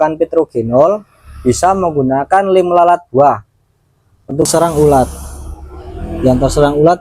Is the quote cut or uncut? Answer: cut